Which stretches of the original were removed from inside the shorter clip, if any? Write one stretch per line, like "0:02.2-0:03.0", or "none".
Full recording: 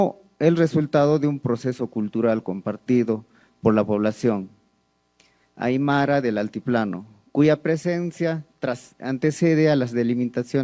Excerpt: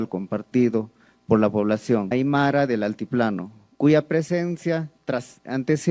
0:04.4-0:05.6